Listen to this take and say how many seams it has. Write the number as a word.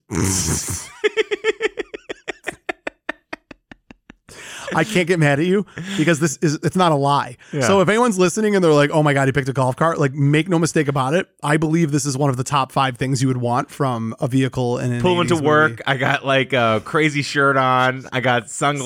zero